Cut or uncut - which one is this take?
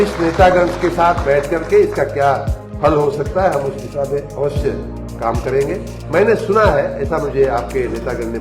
cut